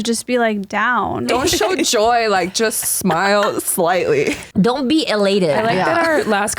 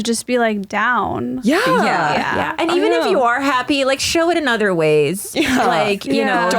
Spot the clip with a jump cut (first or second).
first